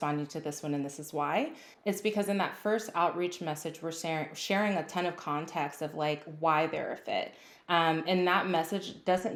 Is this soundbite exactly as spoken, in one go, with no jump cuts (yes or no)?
yes